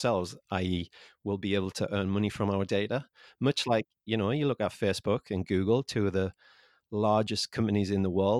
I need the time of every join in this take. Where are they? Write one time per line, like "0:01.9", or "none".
none